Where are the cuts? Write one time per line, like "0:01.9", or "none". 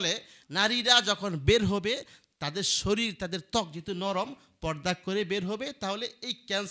none